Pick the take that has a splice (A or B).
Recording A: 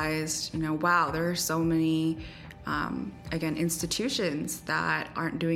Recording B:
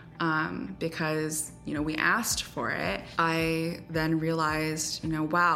B